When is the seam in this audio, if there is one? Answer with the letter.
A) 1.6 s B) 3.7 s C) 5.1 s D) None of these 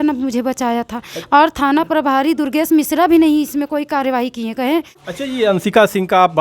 C